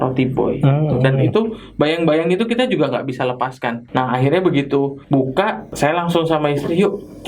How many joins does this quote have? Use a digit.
2